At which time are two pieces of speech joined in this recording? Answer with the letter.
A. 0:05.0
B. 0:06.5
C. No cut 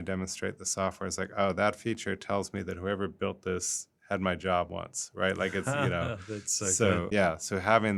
C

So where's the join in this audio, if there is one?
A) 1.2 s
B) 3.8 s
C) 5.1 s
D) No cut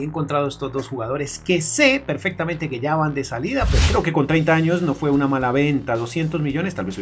B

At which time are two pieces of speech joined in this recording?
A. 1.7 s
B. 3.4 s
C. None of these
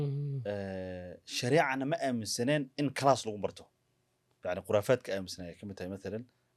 C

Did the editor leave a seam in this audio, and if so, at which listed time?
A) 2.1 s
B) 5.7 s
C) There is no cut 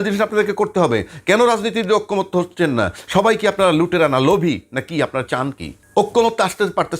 B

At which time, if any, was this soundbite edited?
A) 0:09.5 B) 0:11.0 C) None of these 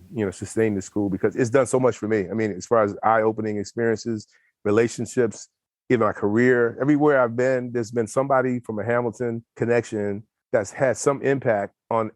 A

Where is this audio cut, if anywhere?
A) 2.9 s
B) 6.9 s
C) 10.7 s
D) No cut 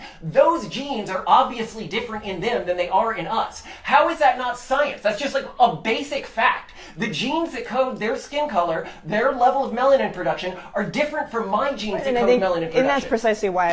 A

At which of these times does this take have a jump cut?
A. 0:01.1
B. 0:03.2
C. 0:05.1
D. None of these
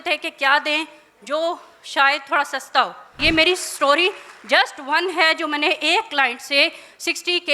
B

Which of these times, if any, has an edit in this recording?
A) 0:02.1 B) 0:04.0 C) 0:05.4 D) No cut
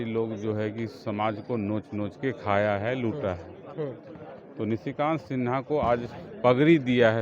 D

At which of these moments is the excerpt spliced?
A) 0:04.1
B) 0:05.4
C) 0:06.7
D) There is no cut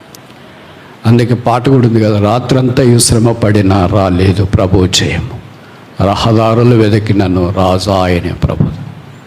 D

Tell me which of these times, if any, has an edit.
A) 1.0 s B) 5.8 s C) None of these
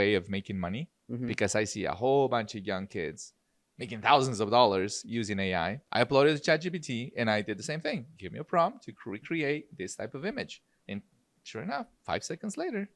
B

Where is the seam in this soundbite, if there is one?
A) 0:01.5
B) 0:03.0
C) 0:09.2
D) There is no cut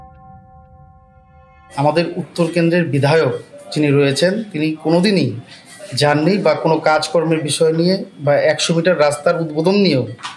A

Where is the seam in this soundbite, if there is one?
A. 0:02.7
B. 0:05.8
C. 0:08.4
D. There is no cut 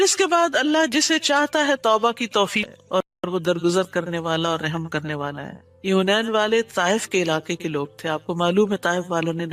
A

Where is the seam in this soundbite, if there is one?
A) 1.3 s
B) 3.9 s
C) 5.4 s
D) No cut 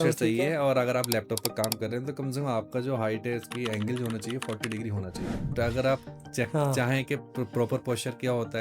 C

